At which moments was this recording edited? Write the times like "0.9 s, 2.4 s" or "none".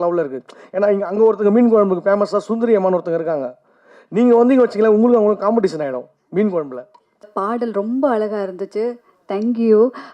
7.3 s